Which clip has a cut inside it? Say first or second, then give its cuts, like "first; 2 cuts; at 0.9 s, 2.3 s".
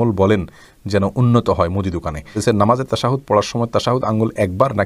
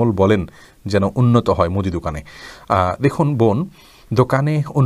first; 1 cut; at 2.4 s